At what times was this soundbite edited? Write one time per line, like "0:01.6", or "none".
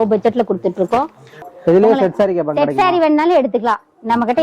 0:01.4